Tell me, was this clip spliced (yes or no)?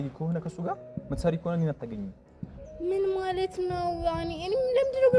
no